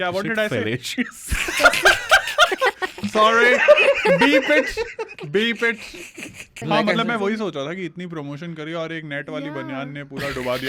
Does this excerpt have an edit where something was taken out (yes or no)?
yes